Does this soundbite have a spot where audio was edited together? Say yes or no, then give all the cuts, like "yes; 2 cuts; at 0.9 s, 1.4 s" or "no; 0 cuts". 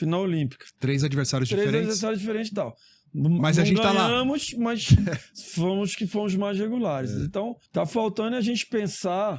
yes; 1 cut; at 7.6 s